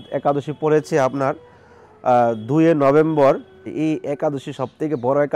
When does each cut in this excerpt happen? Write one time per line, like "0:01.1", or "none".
0:03.7